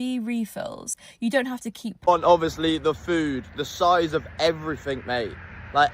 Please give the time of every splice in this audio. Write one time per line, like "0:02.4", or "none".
0:01.9

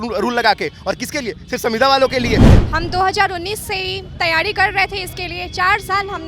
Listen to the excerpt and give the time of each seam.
0:02.5

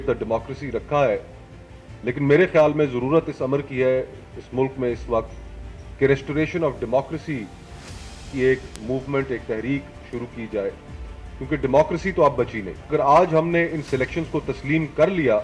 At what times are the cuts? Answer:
0:12.9

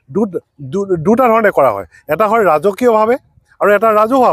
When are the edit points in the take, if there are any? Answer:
none

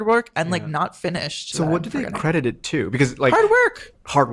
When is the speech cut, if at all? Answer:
0:01.4

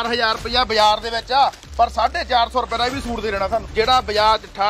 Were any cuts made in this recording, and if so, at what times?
0:03.6

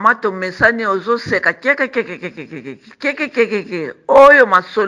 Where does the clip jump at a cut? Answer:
none

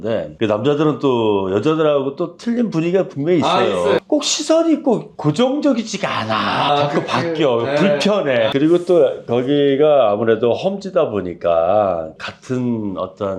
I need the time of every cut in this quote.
0:04.0
0:06.7
0:08.5

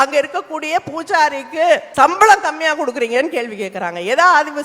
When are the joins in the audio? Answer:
0:01.9

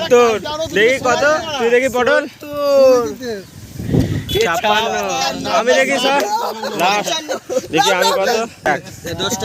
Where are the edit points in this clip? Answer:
none

